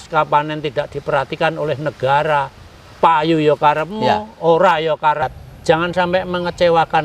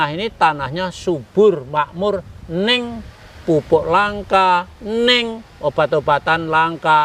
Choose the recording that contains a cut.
first; 1 cut; at 5.3 s

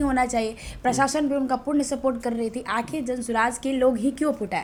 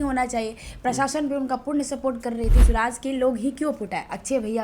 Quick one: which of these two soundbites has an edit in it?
second; 1 cut; at 2.6 s

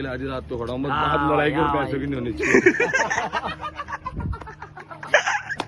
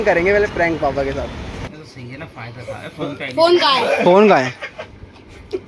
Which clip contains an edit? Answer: second; 1 cut; at 1.5 s

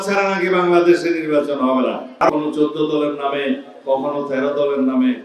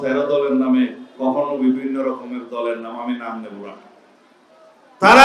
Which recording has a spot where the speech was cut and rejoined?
first; 1 cut; at 2.3 s

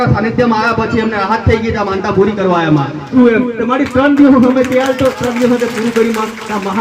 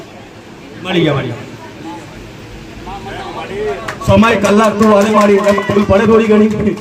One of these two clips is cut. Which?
first; 1 cut; at 3.1 s

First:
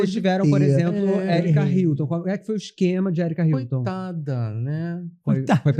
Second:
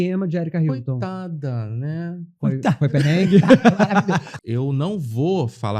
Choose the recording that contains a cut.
second; 1 cut; at 4.3 s

